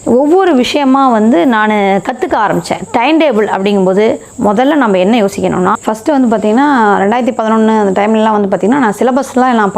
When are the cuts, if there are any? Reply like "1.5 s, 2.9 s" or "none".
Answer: 5.8 s